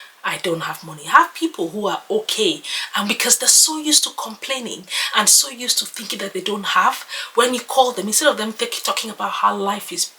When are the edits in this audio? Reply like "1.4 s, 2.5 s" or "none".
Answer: none